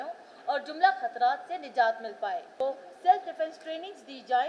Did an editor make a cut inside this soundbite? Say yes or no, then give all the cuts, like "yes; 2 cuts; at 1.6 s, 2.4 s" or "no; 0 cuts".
yes; 1 cut; at 2.5 s